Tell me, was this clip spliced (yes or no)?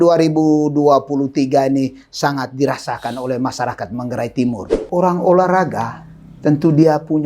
yes